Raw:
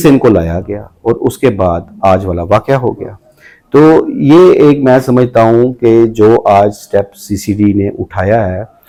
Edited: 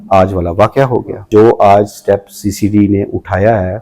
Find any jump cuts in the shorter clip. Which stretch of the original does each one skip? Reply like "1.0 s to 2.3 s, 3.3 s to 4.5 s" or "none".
3.2 s to 6.1 s

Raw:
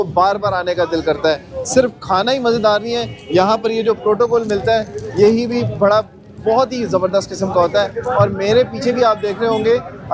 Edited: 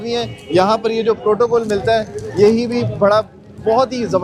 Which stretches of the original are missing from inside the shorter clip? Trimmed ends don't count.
none

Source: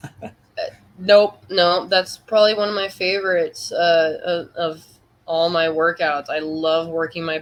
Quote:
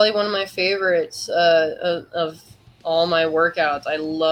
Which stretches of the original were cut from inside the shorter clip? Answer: none

